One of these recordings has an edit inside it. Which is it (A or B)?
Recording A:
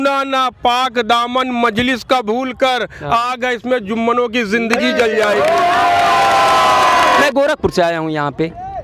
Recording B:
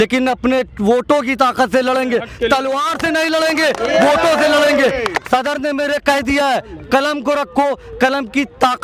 A